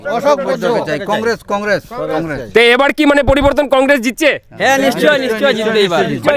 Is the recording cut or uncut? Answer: uncut